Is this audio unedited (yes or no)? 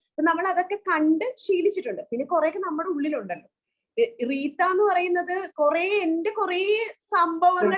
yes